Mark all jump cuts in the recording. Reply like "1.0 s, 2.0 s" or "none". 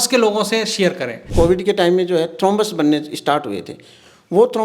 1.3 s